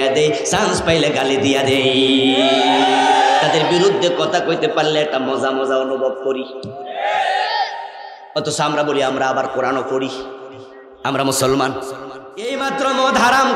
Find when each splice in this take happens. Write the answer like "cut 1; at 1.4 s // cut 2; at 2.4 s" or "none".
cut 1; at 12.5 s